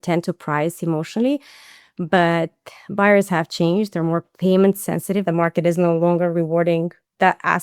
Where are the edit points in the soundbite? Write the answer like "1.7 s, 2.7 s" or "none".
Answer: 5.2 s